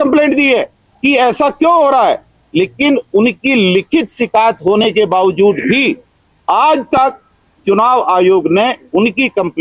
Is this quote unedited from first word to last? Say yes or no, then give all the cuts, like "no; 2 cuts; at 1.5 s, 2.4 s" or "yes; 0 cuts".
yes; 0 cuts